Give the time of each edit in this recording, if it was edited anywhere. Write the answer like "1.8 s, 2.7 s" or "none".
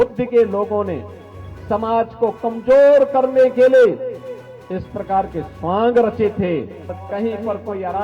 6.9 s